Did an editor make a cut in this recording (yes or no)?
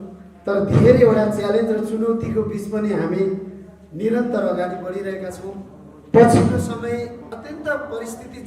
yes